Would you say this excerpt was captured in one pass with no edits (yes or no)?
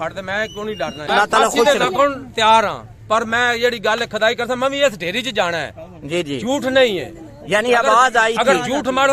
no